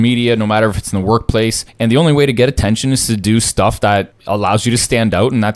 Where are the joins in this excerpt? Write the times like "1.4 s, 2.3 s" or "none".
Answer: 1.7 s, 4.2 s